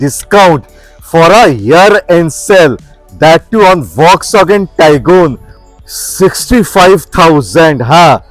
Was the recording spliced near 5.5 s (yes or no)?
yes